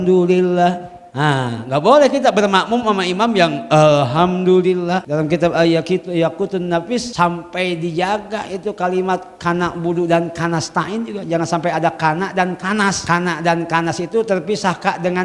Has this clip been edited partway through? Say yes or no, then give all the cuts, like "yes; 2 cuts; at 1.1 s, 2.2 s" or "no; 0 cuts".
yes; 3 cuts; at 5.1 s, 7.1 s, 13.0 s